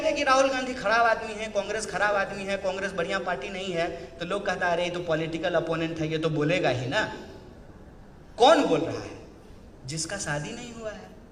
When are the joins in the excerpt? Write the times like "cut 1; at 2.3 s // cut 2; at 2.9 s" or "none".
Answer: none